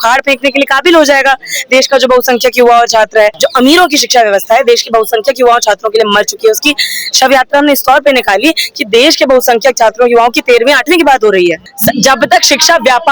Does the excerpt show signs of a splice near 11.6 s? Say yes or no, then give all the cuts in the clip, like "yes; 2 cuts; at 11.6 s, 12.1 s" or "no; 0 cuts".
yes; 2 cuts; at 3.4 s, 11.6 s